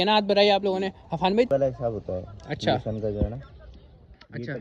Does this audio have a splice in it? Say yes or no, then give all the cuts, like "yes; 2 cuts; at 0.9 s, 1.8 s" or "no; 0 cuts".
yes; 1 cut; at 1.5 s